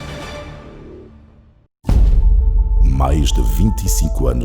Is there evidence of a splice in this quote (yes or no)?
yes